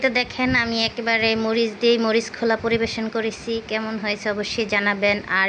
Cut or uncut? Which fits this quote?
uncut